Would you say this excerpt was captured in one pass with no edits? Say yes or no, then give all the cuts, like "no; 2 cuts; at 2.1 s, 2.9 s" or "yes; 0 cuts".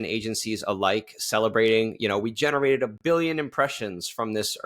yes; 0 cuts